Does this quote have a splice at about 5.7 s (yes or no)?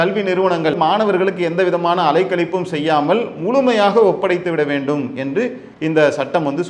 yes